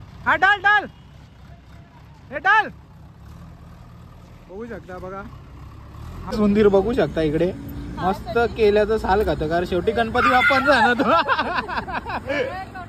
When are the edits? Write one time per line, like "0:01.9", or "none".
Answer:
0:06.3